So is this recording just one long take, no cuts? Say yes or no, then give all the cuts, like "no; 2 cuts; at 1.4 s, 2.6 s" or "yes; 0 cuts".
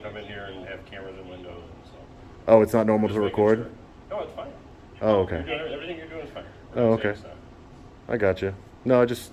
yes; 0 cuts